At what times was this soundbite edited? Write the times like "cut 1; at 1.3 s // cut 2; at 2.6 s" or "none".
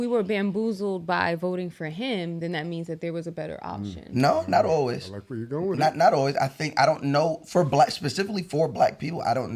none